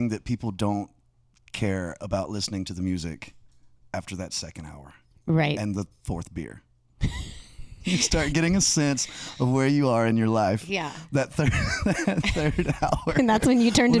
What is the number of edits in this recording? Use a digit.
1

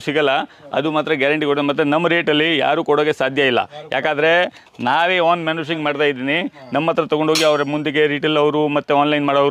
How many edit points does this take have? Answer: 0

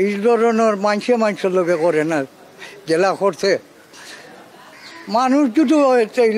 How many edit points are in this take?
0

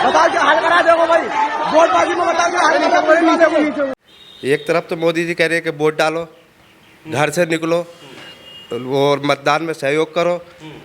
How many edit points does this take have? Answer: 1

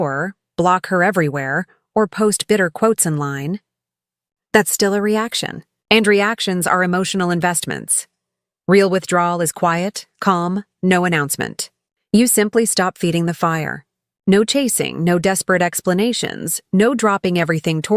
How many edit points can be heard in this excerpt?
0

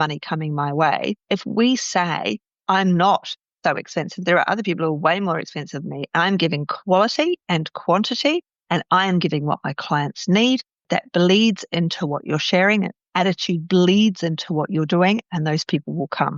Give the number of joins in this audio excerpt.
0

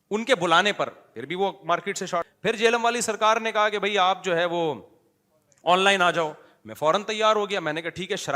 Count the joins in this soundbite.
1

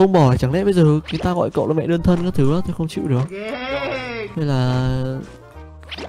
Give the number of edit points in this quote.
0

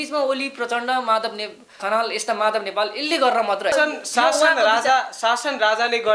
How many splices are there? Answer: 2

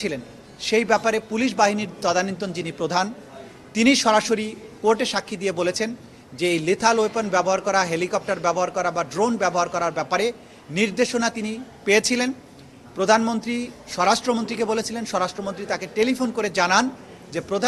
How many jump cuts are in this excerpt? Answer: 0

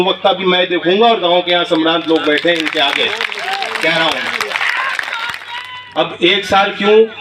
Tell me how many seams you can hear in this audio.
1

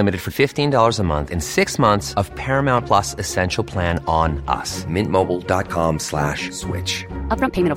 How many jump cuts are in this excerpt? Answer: 0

